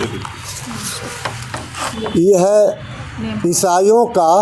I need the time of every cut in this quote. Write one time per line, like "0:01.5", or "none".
none